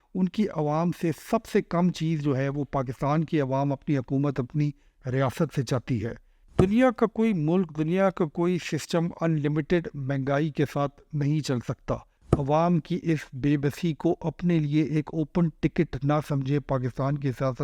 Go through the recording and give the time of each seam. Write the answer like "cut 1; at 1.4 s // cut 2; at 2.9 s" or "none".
cut 1; at 6.3 s